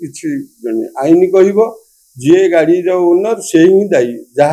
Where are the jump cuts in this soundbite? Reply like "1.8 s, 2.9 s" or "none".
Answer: none